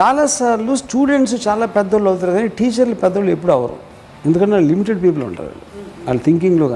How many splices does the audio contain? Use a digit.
0